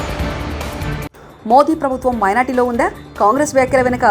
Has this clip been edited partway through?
yes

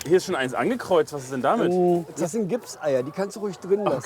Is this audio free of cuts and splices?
no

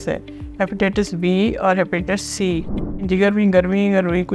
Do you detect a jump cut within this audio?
yes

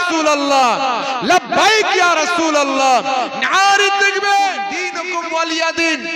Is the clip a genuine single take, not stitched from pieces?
no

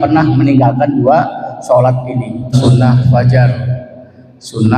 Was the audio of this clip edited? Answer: yes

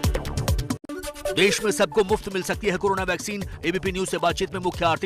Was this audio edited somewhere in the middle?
no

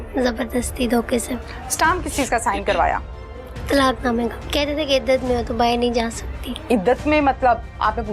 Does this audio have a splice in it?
yes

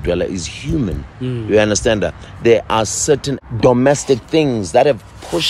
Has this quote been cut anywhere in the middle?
yes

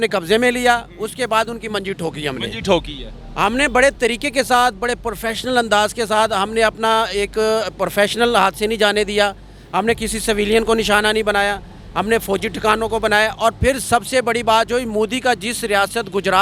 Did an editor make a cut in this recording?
no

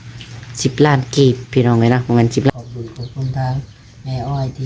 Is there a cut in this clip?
yes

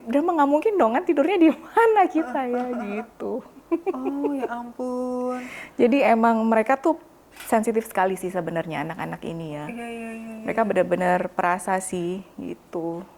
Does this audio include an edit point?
no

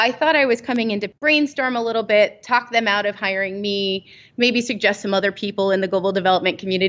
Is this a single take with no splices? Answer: no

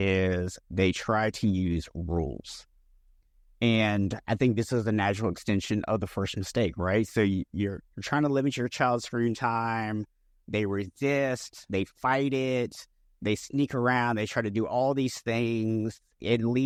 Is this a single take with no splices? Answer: yes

